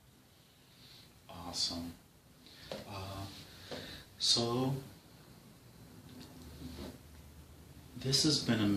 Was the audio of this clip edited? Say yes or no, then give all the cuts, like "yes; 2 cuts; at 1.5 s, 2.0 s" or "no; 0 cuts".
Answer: no; 0 cuts